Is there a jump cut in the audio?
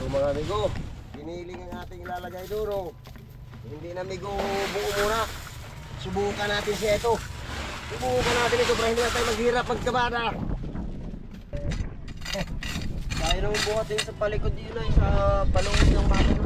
yes; 1 cut; at 11.5 s

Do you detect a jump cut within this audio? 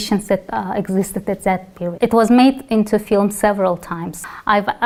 no; 0 cuts

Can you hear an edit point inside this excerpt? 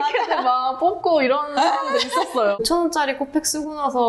yes; 1 cut; at 2.6 s

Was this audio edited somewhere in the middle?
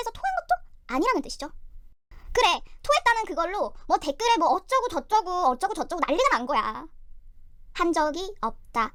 no; 0 cuts

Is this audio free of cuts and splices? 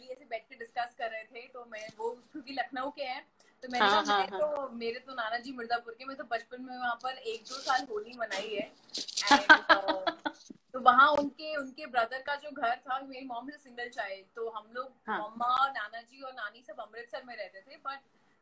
yes; 0 cuts

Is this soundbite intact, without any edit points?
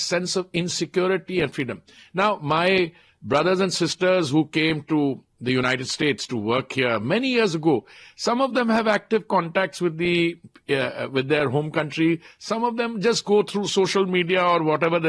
yes; 0 cuts

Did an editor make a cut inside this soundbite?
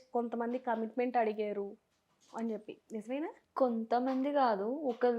yes; 1 cut; at 3.4 s

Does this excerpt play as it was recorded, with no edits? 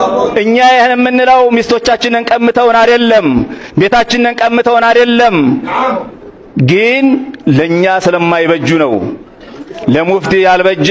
yes; 0 cuts

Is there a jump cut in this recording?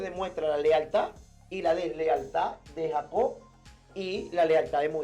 no; 0 cuts

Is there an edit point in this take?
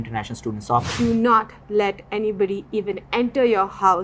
yes; 1 cut; at 0.9 s

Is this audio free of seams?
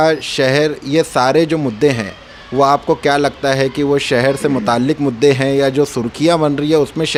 yes; 0 cuts

